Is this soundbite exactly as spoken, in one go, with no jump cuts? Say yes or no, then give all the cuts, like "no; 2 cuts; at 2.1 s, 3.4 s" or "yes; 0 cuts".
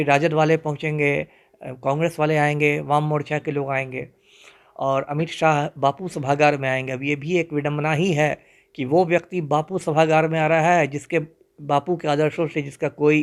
yes; 0 cuts